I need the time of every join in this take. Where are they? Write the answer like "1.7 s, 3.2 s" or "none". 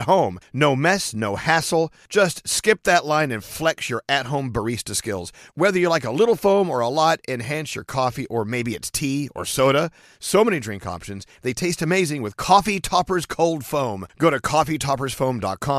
none